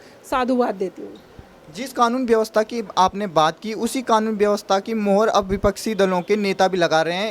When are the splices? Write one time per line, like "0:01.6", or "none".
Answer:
none